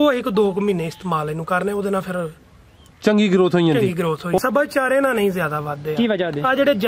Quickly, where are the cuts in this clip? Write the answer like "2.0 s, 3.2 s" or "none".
4.4 s